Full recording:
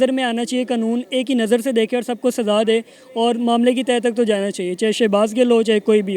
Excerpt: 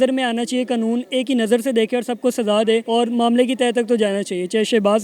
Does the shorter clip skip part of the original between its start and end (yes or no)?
yes